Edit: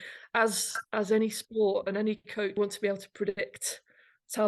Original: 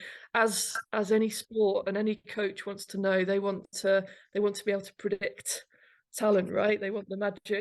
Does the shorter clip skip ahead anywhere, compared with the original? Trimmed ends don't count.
yes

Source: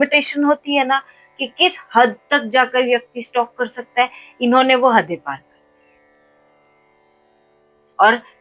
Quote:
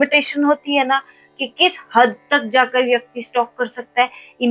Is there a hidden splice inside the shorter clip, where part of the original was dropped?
no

